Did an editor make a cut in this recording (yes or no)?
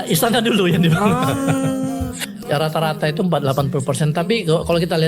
yes